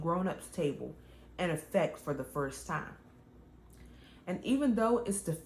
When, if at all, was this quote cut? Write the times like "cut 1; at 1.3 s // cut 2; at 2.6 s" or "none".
none